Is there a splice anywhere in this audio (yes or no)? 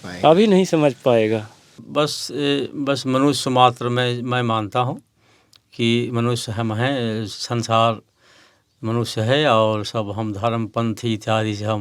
yes